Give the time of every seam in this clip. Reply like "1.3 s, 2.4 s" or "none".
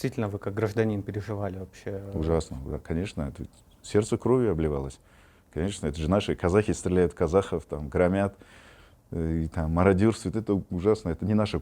none

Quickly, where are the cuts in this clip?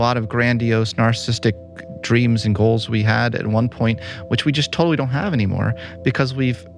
none

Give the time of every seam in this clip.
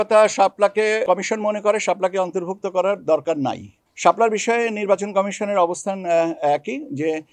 1.0 s, 3.8 s

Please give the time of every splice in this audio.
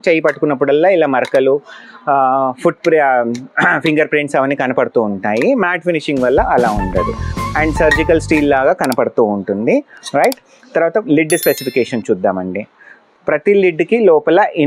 none

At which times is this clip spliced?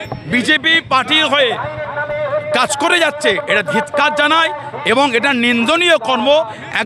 none

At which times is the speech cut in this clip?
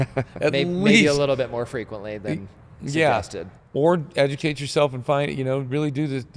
none

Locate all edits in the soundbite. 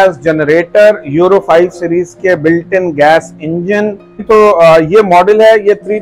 4.2 s

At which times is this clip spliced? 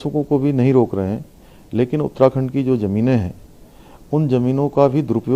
none

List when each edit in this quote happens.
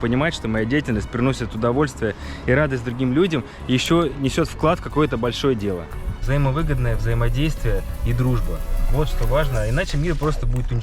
6.2 s

